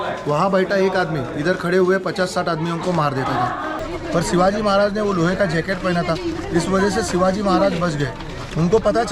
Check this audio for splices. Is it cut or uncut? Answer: cut